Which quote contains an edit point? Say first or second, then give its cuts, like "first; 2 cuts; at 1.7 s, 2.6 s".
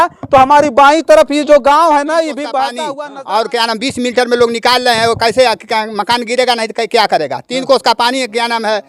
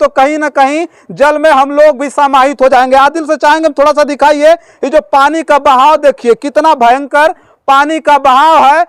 first; 1 cut; at 2.8 s